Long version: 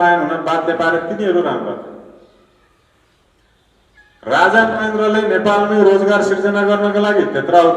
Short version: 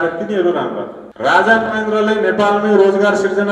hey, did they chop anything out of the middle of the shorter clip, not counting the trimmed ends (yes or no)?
yes